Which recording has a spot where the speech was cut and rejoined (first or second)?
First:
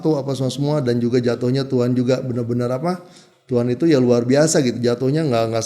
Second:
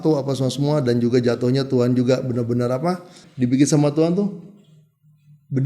second